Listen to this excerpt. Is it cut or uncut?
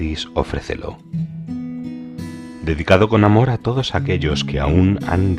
uncut